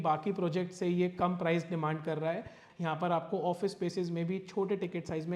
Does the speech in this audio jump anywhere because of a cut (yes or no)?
yes